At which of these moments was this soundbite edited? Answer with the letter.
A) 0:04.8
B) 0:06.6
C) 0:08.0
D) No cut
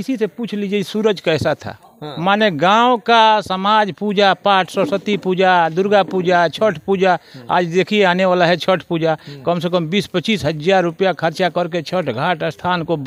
D